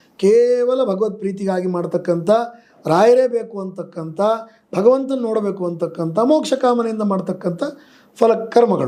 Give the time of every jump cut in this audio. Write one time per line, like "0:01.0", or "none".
none